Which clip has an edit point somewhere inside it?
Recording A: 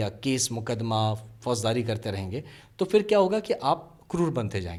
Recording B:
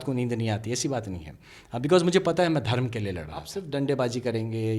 B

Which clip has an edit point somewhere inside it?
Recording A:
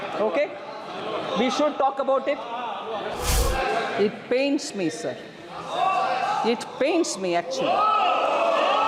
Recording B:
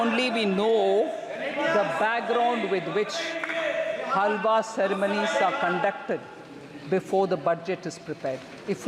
A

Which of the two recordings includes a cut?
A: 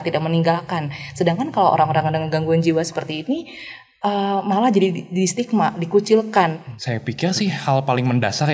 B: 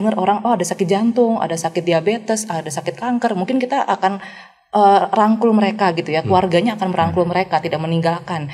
A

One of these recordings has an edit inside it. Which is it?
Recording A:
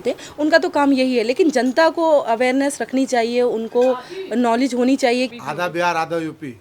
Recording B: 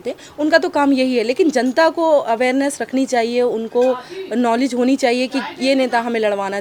A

